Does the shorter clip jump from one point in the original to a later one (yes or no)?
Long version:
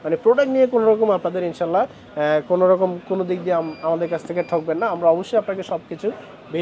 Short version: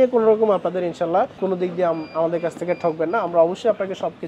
yes